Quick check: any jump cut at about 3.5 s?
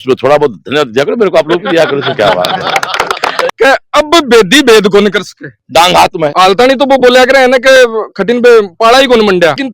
yes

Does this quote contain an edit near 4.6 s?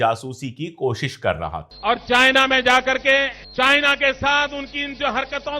no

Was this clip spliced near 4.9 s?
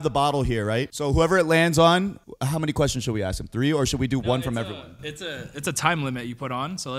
no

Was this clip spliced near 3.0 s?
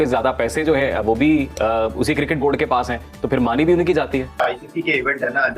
no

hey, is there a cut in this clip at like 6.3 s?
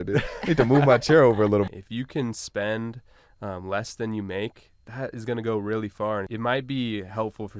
yes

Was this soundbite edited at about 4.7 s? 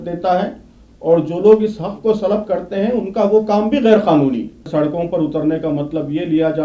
yes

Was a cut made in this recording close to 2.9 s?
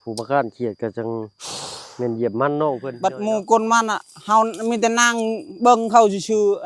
yes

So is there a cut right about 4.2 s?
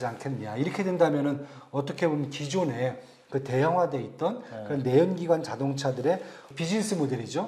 no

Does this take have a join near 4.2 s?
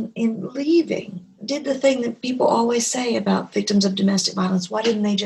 no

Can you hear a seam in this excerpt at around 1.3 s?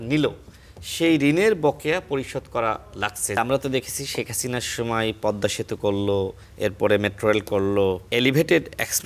no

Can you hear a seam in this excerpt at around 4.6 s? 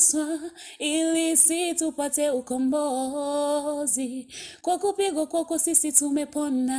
no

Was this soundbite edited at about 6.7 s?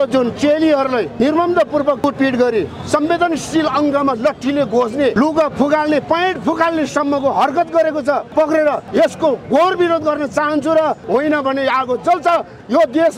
no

